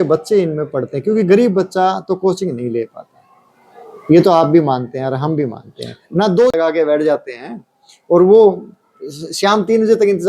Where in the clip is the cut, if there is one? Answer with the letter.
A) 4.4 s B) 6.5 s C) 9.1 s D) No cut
B